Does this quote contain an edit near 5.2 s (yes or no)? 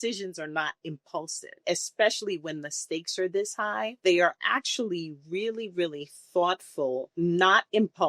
no